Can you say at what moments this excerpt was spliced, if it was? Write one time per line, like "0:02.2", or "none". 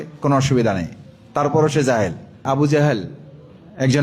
0:02.4